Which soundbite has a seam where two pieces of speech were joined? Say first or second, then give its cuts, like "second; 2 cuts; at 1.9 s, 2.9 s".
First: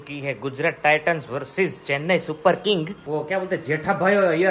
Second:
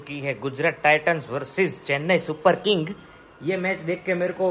first; 1 cut; at 3.0 s